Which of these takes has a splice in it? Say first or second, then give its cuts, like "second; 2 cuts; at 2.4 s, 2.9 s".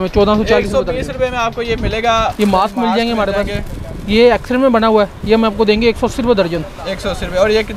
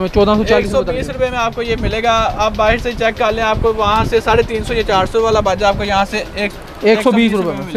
first; 1 cut; at 2.3 s